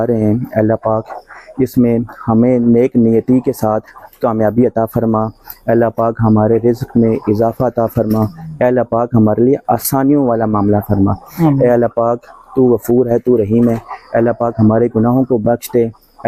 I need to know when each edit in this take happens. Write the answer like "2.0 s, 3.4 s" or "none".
none